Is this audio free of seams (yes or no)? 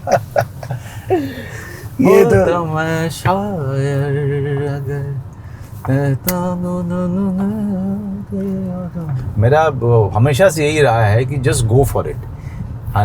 no